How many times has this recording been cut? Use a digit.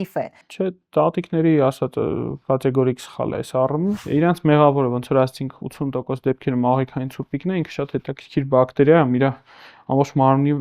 1